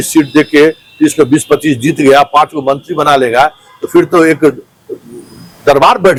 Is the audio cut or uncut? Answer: uncut